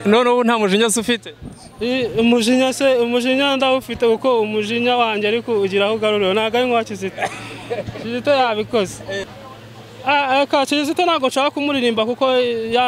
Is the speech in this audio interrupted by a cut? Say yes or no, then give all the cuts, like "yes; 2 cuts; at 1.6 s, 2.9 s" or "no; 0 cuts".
yes; 1 cut; at 9.2 s